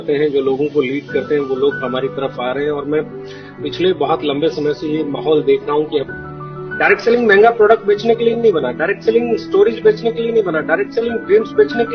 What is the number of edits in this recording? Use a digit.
1